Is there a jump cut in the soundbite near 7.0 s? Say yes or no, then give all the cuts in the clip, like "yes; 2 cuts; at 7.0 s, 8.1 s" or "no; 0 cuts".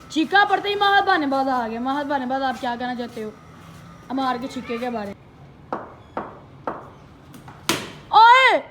no; 1 cut; at 5.3 s